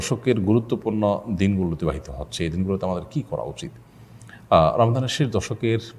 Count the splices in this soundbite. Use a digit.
0